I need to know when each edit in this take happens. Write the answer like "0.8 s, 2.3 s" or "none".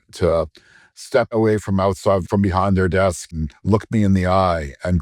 1.3 s, 2.3 s, 3.4 s